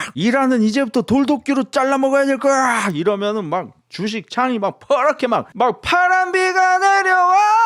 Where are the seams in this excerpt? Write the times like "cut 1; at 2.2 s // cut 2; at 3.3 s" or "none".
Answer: none